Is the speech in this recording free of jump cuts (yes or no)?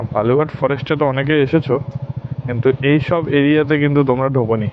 yes